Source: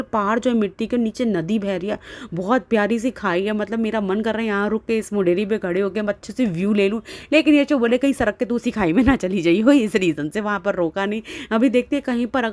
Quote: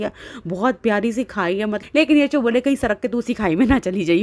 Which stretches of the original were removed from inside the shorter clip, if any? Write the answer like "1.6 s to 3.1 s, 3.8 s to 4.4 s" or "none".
3.7 s to 7.2 s